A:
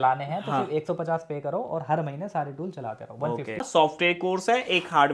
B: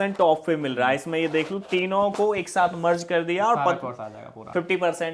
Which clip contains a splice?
A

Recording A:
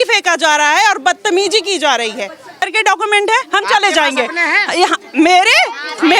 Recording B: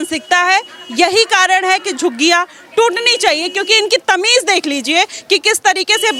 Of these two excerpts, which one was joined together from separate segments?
A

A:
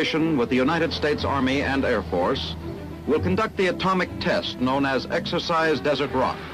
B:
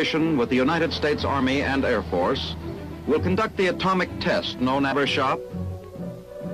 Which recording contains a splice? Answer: A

